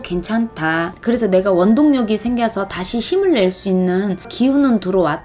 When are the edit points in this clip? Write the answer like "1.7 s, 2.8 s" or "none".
0.9 s, 4.3 s